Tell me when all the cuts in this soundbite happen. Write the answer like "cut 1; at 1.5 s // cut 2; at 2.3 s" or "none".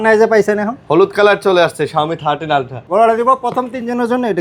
cut 1; at 2.8 s